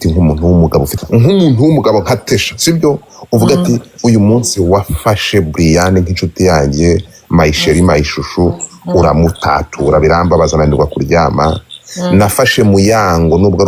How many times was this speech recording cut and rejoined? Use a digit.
1